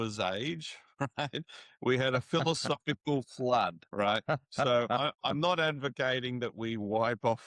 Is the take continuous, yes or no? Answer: no